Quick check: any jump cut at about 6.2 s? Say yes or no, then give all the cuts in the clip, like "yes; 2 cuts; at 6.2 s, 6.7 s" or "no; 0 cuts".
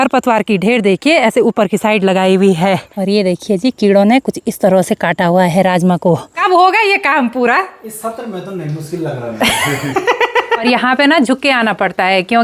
yes; 3 cuts; at 2.8 s, 6.2 s, 10.6 s